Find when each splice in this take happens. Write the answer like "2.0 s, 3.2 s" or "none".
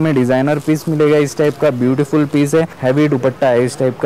2.7 s